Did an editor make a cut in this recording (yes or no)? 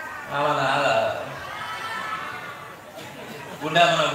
no